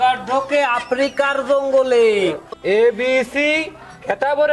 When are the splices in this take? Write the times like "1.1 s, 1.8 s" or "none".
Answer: 2.5 s